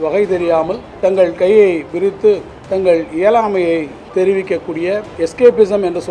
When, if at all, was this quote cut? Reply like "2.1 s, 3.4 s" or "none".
0.9 s, 2.5 s, 4.0 s, 5.1 s